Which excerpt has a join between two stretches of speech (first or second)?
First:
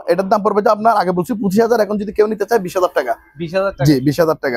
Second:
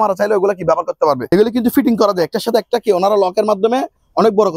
second